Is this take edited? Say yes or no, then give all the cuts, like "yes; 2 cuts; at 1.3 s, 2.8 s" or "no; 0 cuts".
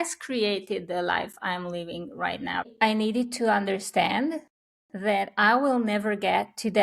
yes; 1 cut; at 2.7 s